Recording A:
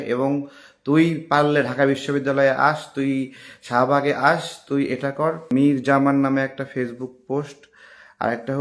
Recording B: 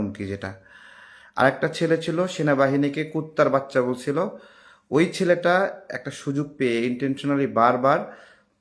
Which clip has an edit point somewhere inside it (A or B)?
A